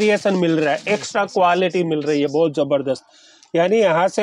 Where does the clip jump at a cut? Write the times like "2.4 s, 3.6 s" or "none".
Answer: none